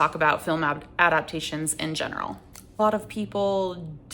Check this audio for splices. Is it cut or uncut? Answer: cut